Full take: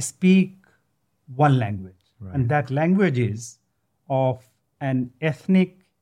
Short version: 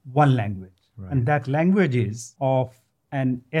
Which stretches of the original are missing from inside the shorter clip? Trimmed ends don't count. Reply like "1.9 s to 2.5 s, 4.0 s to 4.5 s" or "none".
3.4 s to 3.9 s